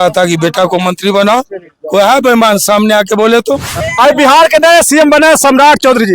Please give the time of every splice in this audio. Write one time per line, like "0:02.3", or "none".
0:03.9